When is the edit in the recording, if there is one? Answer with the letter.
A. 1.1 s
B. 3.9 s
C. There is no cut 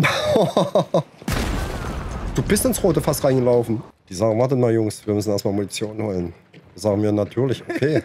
B